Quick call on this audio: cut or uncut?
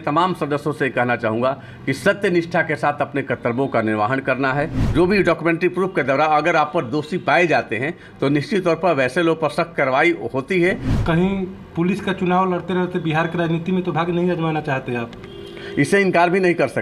cut